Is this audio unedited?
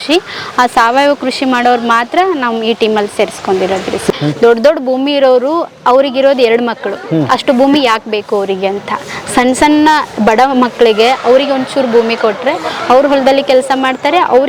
no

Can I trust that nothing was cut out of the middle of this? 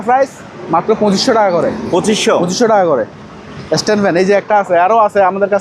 yes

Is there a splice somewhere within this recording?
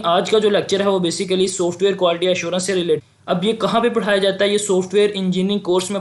yes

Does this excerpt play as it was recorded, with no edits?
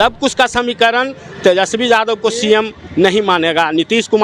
yes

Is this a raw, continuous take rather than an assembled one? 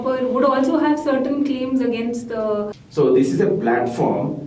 no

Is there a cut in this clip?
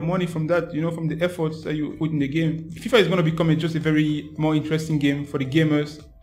yes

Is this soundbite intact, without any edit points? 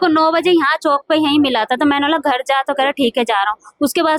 yes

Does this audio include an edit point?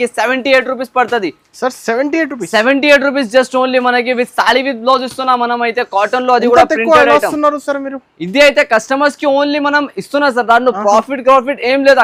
no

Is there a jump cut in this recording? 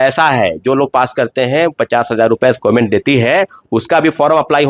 no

